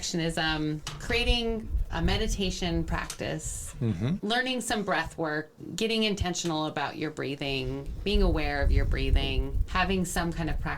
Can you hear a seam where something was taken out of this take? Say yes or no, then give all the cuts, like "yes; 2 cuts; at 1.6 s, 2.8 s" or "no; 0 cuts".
yes; 3 cuts; at 4.2 s, 5.6 s, 9.6 s